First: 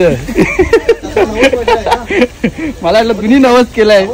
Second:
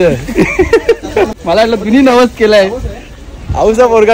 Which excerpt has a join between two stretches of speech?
second; 1 cut; at 1.3 s

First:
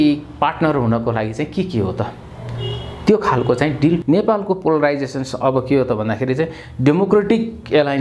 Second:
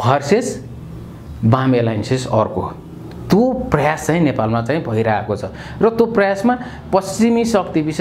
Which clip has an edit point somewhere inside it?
first; 1 cut; at 4.0 s

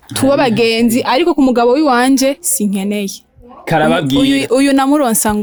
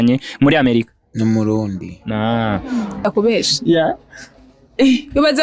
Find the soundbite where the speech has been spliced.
second; 1 cut; at 3.0 s

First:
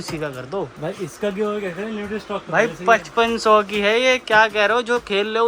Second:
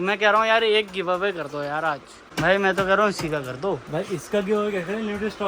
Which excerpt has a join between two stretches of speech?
second; 1 cut; at 2.2 s

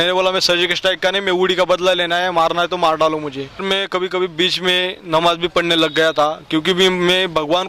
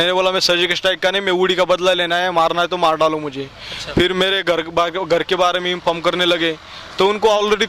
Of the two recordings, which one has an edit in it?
first; 1 cut; at 3.6 s

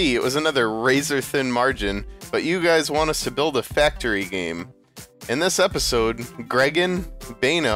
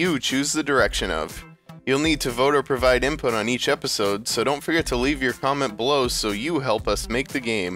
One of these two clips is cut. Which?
first; 1 cut; at 2.4 s

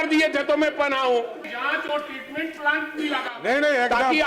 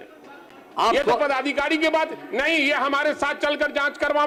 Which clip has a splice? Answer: first; 1 cut; at 1.5 s

